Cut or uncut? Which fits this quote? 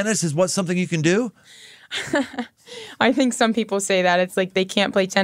uncut